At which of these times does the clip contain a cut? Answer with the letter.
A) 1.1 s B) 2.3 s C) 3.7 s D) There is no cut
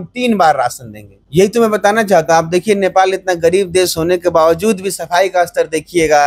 A